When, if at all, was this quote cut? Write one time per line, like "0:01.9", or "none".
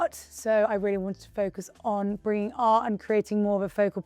none

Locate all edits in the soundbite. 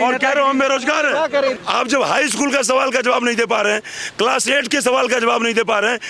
0:01.5

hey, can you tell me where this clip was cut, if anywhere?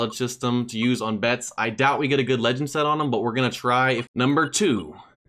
0:04.1

